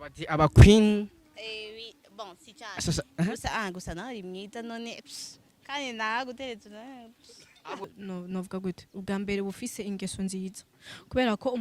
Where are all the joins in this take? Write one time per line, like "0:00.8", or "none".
0:07.9